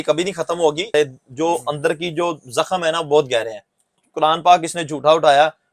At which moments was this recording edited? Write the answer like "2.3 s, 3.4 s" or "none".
0.9 s, 4.0 s